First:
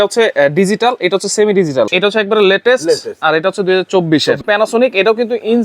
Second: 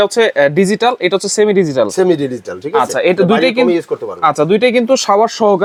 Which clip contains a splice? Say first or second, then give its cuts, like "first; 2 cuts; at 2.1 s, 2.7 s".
first; 2 cuts; at 1.9 s, 4.4 s